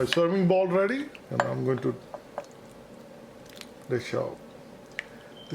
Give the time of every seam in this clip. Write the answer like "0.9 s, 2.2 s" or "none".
1.2 s